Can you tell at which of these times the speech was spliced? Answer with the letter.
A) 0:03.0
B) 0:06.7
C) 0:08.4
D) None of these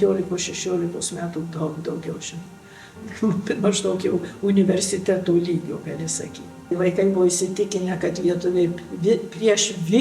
B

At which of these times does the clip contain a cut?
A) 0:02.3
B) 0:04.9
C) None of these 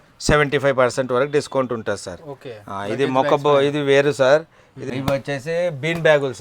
B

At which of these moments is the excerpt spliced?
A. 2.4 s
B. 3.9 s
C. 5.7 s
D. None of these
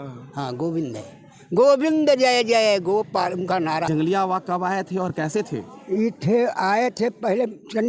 B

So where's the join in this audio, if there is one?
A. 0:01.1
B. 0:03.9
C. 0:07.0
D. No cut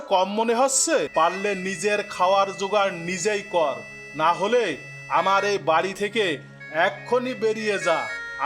A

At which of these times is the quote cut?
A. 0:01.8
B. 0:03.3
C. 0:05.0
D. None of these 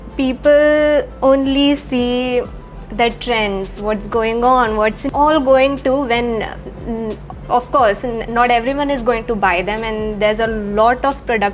C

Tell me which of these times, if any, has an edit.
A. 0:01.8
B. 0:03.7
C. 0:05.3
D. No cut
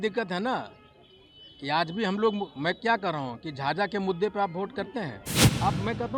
C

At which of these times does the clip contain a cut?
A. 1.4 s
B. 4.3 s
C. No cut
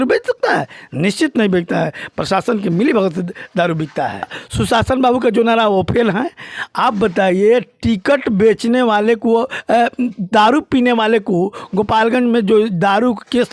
B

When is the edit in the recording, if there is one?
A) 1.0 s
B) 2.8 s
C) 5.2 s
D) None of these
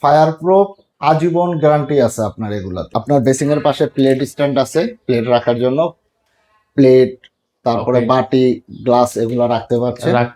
B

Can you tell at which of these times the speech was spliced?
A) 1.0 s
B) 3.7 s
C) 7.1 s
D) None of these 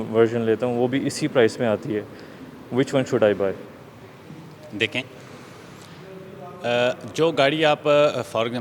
D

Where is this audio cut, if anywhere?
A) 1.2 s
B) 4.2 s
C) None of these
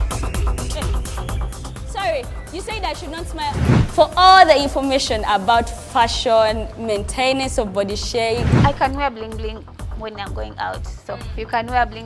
C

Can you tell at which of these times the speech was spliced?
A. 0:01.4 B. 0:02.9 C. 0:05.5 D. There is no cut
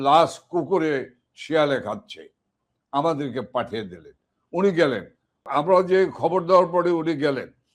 C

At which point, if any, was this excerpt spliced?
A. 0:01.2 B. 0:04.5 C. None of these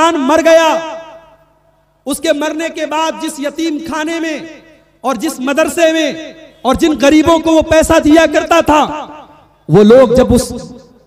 C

